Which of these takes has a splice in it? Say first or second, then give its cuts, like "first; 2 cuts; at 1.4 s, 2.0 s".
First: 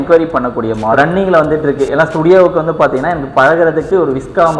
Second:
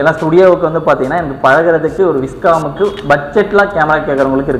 first; 1 cut; at 0.9 s